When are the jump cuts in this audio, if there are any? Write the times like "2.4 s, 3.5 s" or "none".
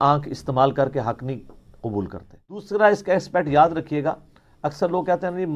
2.7 s